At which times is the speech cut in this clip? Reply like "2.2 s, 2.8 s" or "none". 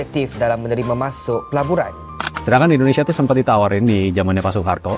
2.3 s